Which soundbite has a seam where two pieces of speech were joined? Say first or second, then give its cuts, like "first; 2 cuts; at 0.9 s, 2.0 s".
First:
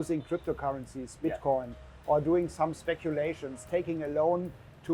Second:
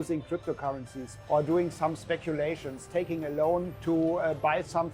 second; 2 cuts; at 1.0 s, 3.7 s